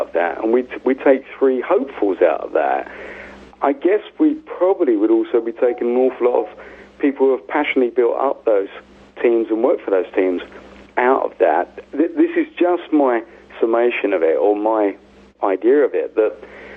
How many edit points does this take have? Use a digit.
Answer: 1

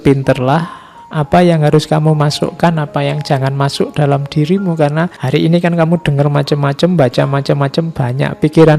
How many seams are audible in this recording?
1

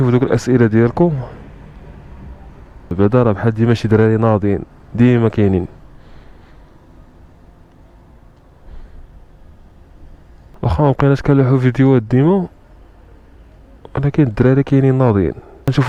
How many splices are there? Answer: 0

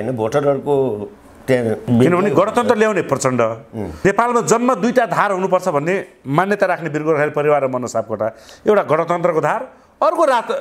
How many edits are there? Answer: 0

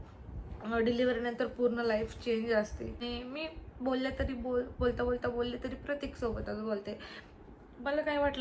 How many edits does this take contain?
1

